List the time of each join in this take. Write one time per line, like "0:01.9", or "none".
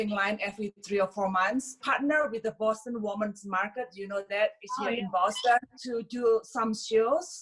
0:01.8
0:05.8